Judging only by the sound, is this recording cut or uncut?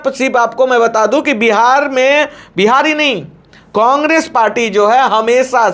uncut